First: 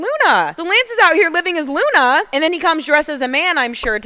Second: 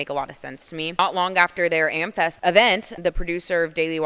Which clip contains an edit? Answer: second; 3 cuts; at 0.9 s, 2.4 s, 2.9 s

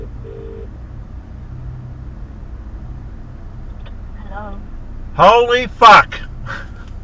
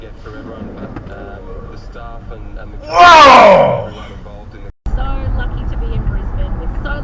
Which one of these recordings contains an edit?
second; 1 cut; at 4.7 s

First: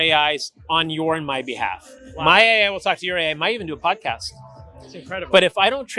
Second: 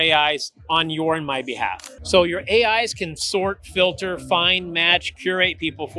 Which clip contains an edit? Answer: second; 1 cut; at 1.9 s

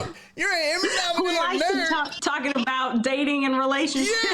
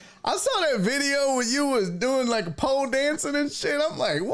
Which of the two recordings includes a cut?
first; 1 cut; at 2.1 s

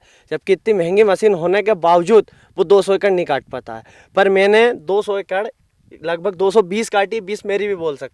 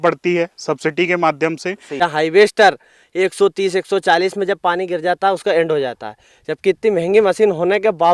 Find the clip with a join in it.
second; 1 cut; at 1.9 s

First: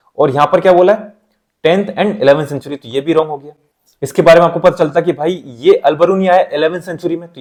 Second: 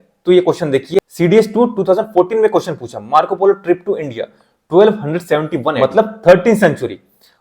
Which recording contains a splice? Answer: second; 1 cut; at 5.8 s

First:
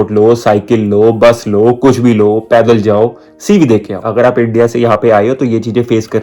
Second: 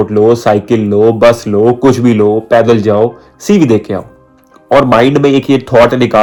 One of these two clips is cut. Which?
first; 1 cut; at 4.0 s

